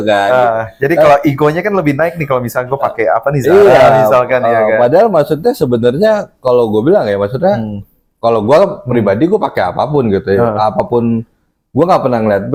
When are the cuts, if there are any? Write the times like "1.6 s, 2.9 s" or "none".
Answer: none